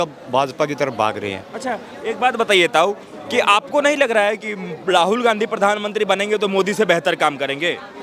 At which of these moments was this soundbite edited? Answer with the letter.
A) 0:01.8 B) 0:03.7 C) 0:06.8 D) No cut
D